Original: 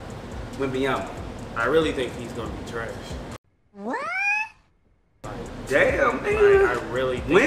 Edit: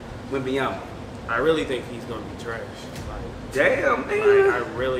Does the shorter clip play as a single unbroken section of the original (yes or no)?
no